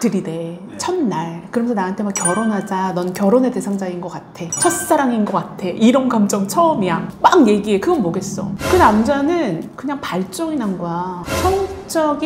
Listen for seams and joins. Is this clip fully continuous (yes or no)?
yes